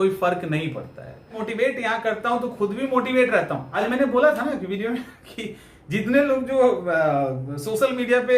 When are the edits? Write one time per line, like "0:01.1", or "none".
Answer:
0:01.4
0:03.6

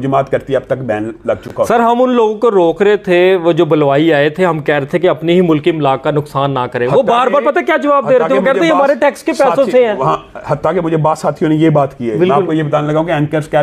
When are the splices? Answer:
none

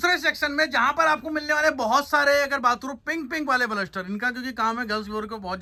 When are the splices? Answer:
none

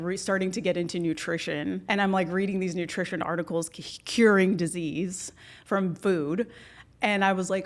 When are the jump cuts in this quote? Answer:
0:01.8

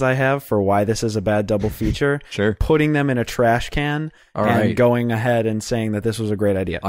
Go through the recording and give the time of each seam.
0:03.6

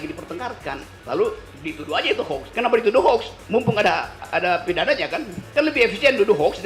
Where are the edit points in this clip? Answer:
0:02.5
0:04.2
0:05.4

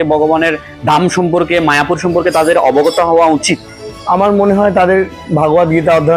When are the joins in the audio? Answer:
none

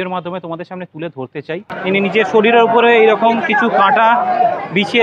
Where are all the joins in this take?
0:01.7

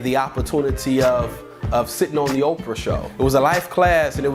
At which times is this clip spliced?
0:03.0

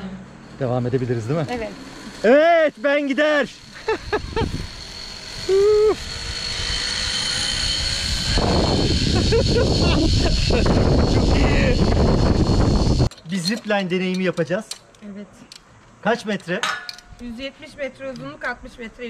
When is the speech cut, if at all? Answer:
0:13.1

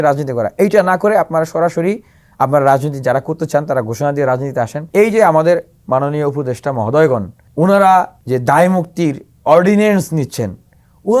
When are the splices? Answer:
0:04.8
0:07.4
0:08.2

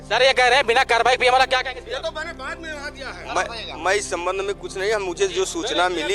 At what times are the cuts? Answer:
none

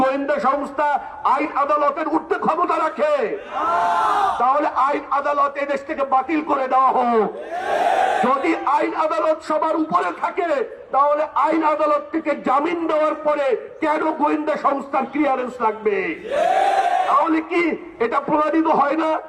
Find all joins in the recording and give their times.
none

